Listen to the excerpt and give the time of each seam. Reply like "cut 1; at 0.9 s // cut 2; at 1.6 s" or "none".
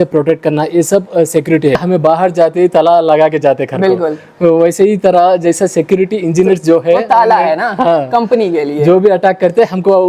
cut 1; at 1.8 s